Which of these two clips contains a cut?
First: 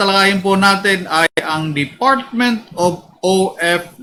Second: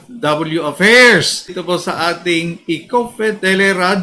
second; 1 cut; at 1.6 s

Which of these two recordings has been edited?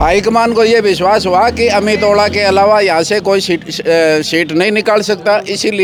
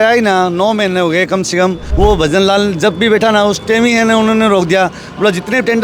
second; 1 cut; at 1.8 s

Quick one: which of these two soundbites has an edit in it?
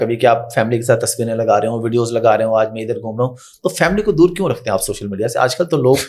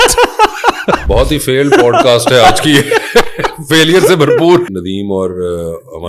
second; 2 cuts; at 1.0 s, 4.7 s

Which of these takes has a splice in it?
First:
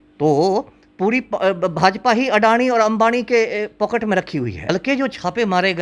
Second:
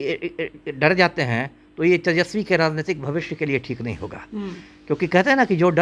first; 1 cut; at 4.6 s

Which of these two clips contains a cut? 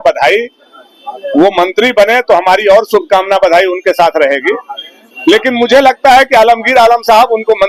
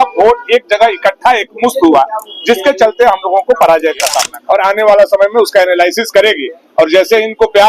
second; 1 cut; at 4.3 s

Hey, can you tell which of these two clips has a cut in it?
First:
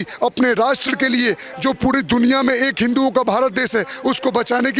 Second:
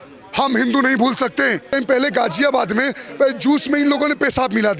second; 1 cut; at 1.7 s

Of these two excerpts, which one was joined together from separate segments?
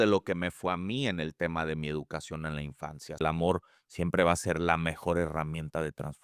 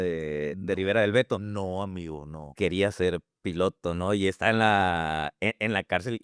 first; 1 cut; at 3.2 s

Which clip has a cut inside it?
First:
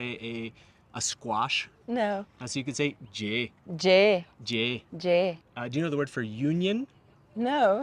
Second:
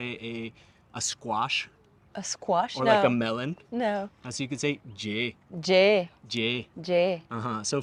first; 2 cuts; at 1.7 s, 5.5 s

